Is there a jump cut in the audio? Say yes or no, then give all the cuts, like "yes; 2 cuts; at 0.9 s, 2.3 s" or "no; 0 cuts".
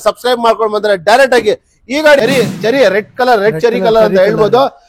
yes; 1 cut; at 2.2 s